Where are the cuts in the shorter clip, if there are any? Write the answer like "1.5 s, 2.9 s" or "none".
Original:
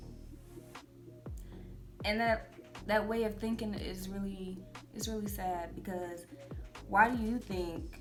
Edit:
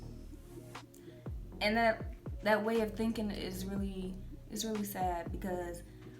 1.6 s